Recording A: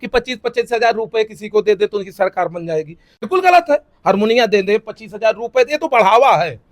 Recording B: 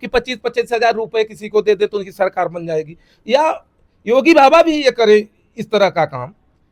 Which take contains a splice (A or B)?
A